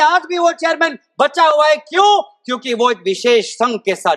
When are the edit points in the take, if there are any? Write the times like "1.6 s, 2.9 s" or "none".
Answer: none